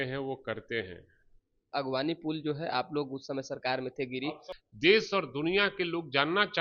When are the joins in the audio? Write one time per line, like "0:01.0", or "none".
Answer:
0:01.6
0:04.5